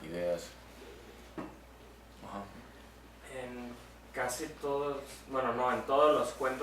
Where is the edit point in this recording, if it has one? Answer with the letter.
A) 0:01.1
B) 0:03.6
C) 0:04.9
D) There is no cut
B